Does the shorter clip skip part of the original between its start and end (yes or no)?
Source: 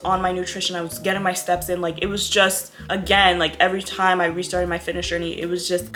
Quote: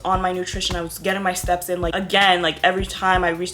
yes